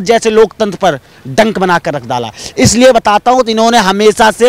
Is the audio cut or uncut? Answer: uncut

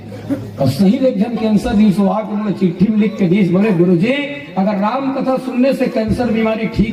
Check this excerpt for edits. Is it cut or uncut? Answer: uncut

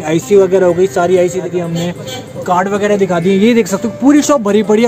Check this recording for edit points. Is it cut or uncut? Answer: cut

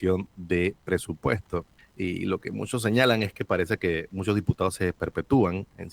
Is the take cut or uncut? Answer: cut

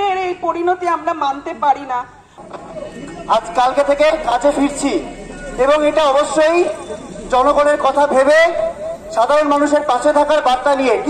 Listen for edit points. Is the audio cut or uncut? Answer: cut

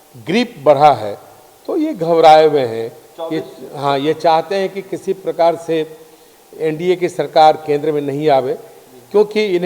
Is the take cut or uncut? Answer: uncut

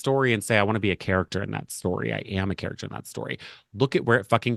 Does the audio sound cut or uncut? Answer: uncut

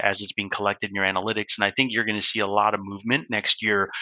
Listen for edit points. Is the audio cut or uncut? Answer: uncut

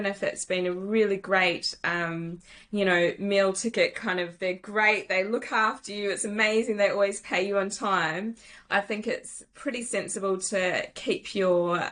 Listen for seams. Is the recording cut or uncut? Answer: uncut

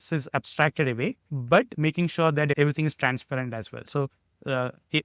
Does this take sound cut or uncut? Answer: cut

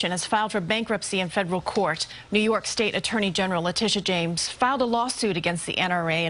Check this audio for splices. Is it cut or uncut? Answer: cut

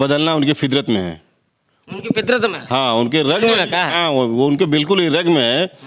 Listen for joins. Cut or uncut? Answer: uncut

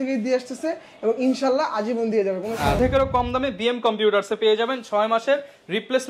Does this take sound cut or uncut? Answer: cut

